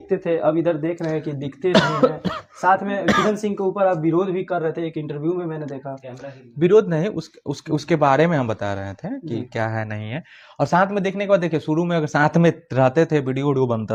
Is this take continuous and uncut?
yes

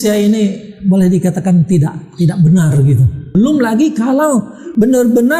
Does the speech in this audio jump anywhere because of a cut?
yes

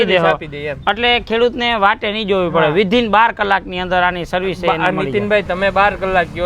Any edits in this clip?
no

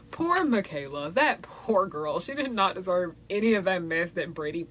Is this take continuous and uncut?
yes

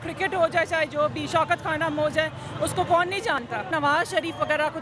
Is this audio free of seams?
no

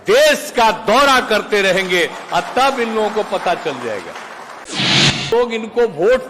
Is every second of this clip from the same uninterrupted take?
no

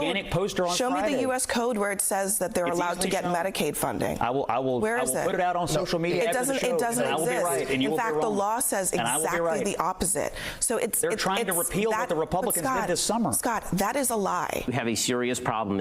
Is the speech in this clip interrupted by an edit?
yes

